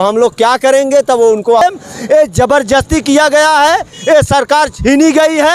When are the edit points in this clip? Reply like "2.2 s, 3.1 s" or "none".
1.6 s